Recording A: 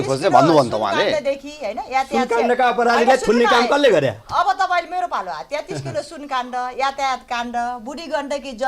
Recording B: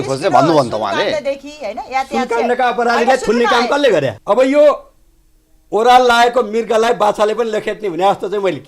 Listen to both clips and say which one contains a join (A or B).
B